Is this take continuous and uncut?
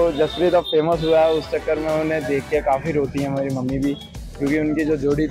yes; 0 cuts

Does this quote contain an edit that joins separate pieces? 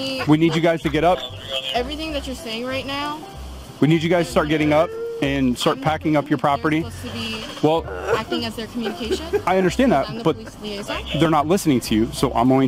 no; 0 cuts

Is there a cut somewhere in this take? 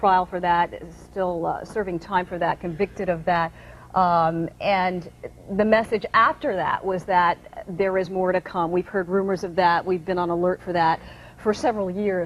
no; 0 cuts

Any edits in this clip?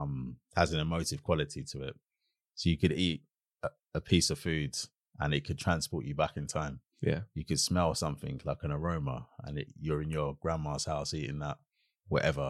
no; 0 cuts

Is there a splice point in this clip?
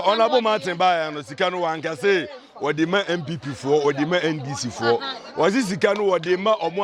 no; 0 cuts

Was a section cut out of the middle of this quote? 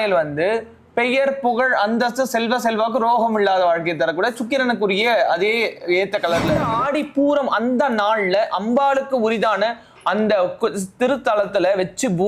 yes; 1 cut; at 6.7 s

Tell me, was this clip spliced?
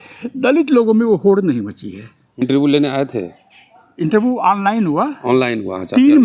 yes; 1 cut; at 2.4 s

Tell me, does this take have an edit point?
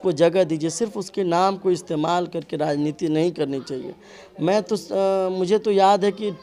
no; 0 cuts

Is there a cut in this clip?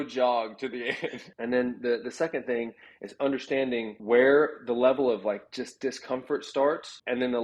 yes; 1 cut; at 1.3 s

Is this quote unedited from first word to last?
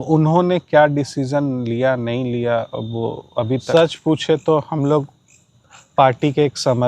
no; 1 cut; at 3.6 s

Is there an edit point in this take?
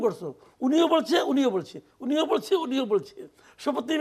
no; 0 cuts

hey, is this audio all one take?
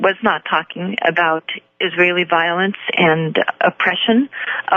yes; 0 cuts

